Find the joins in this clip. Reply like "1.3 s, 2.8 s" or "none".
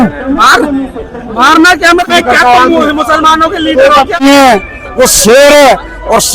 2.1 s, 4.2 s

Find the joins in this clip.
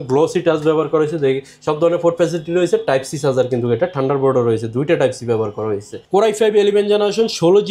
5.9 s

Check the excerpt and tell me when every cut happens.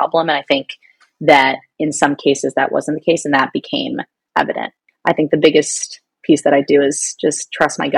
4.8 s

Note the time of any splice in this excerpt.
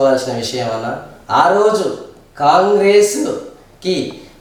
none

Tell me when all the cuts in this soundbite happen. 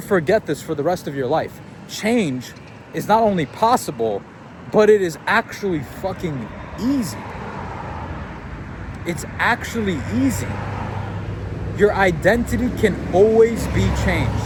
none

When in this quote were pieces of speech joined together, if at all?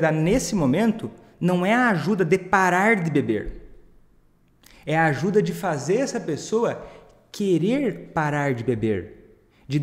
none

